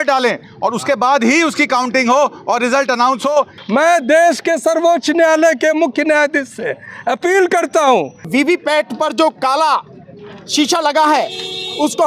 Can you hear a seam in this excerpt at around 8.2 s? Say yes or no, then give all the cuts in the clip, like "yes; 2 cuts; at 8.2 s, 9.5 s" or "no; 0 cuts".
yes; 2 cuts; at 3.6 s, 8.2 s